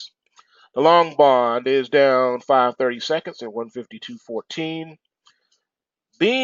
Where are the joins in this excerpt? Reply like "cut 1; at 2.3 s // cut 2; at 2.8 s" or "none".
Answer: none